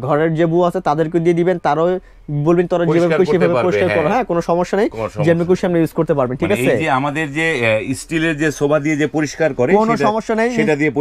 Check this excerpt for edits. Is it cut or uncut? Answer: uncut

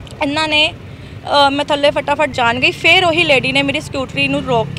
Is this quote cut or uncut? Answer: cut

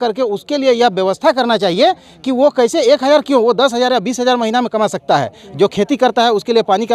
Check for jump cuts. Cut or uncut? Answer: uncut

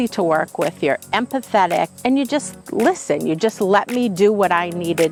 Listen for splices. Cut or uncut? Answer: uncut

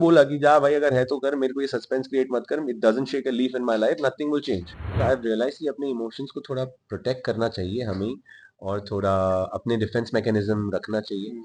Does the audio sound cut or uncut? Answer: cut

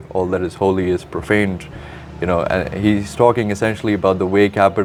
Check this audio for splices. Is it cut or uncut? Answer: uncut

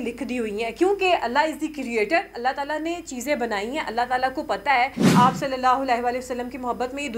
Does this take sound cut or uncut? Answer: cut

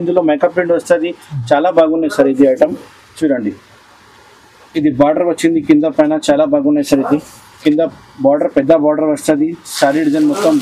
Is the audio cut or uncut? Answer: uncut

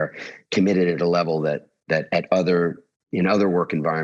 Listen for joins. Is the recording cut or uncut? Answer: uncut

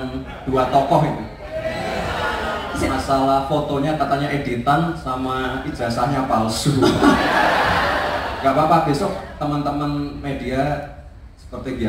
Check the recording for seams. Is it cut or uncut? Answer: uncut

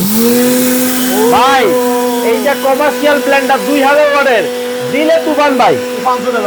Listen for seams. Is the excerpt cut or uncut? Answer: uncut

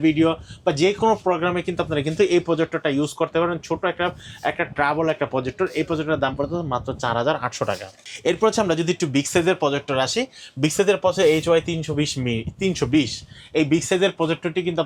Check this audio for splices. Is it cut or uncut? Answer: uncut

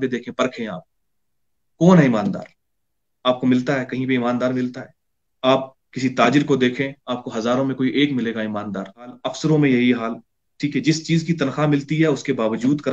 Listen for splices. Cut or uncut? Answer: uncut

